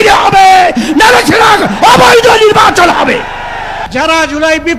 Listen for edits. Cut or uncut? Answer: cut